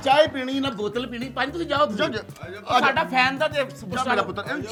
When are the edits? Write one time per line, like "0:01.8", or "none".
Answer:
none